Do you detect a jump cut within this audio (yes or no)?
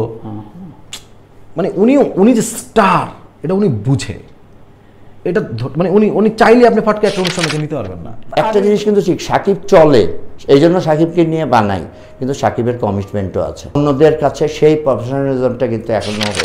yes